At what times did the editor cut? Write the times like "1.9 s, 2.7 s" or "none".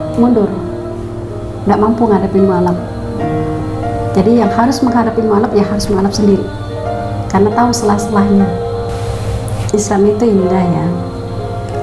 none